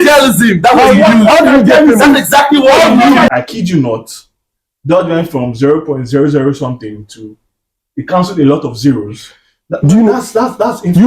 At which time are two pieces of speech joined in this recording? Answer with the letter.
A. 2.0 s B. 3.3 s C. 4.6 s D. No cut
B